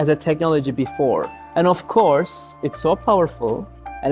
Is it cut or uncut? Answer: cut